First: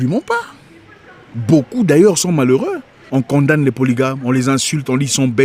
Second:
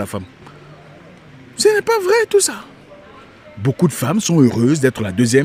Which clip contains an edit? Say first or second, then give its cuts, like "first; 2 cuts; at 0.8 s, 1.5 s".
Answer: first; 1 cut; at 3.0 s